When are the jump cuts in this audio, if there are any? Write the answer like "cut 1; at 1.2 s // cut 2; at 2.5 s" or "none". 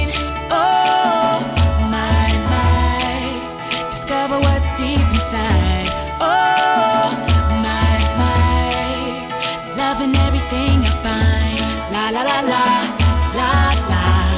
none